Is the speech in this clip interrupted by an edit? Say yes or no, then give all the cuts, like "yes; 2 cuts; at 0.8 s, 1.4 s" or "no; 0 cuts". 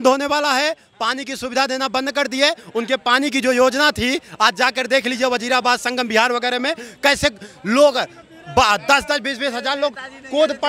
no; 0 cuts